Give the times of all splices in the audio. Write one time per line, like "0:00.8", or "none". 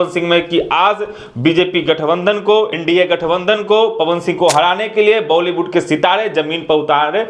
0:02.8